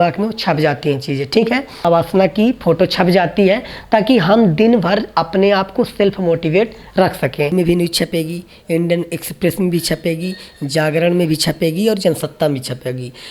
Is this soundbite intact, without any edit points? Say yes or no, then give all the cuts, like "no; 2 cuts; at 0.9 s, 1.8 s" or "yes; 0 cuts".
no; 2 cuts; at 1.9 s, 7.5 s